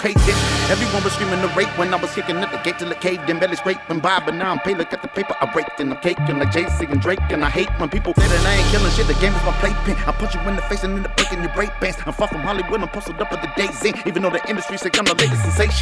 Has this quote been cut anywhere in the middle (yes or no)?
no